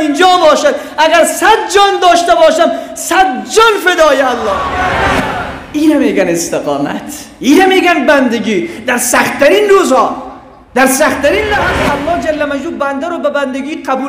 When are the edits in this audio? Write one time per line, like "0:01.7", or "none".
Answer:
0:04.9
0:11.7